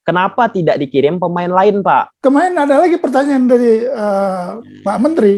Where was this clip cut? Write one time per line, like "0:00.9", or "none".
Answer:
0:02.1

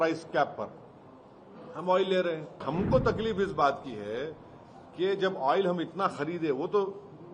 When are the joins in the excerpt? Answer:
0:02.6

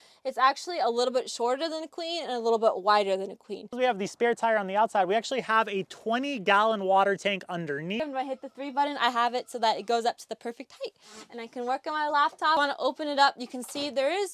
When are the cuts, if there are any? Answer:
0:03.7
0:08.0
0:12.6

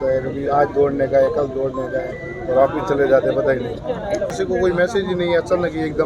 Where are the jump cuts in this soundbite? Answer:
0:04.3

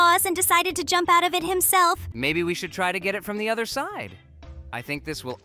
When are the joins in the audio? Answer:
0:02.1

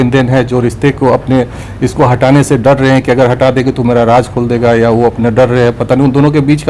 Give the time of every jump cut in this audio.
none

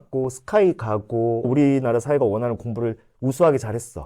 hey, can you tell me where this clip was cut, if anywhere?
0:01.4

